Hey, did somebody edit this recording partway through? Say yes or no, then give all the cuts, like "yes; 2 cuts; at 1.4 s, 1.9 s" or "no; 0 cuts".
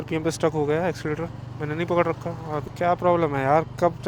yes; 1 cut; at 2.6 s